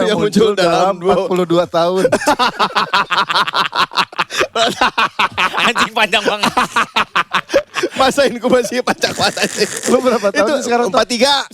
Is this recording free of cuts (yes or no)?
yes